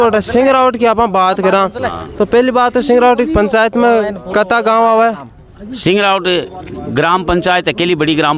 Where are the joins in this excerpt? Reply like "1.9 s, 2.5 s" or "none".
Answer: none